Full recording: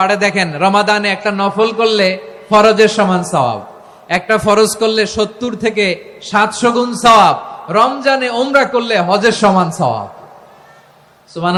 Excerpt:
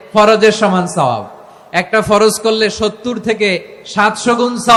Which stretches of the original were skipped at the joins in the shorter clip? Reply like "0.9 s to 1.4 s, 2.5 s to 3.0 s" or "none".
none